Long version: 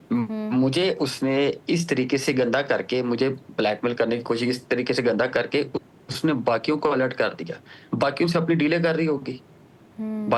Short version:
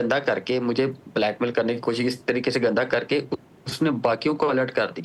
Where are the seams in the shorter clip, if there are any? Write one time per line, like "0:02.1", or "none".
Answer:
none